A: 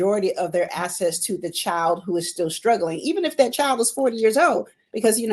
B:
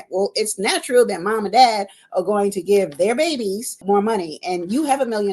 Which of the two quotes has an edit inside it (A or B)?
B